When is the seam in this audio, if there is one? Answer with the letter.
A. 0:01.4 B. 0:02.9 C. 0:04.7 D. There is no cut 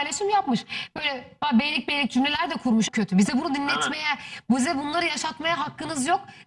B